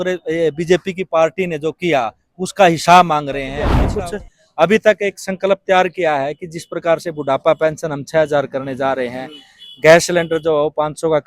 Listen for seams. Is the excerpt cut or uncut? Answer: cut